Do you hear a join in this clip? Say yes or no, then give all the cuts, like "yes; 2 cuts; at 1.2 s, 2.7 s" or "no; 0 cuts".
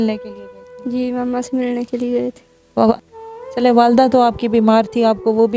yes; 1 cut; at 2.9 s